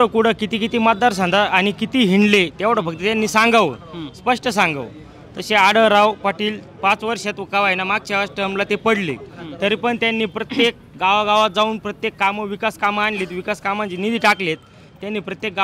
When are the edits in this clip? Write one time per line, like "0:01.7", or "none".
none

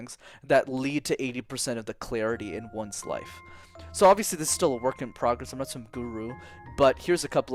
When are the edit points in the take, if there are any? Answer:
none

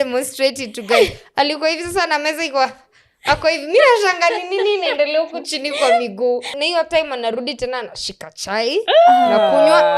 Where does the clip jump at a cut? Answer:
0:06.5

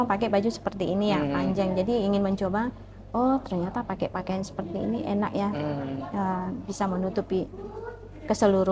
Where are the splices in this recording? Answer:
none

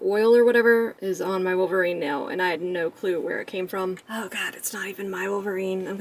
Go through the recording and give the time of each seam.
0:01.0
0:04.0

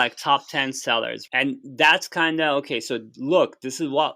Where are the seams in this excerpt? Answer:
0:01.2

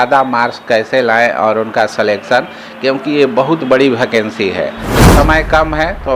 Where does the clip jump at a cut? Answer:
0:05.0

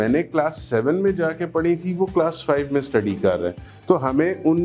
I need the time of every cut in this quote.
none

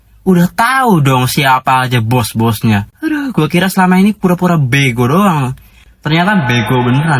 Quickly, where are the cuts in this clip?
none

